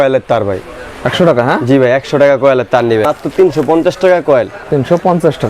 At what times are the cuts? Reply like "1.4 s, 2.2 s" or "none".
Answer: 3.0 s